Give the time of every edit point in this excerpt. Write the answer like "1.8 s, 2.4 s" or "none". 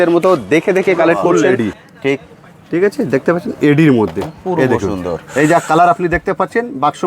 1.5 s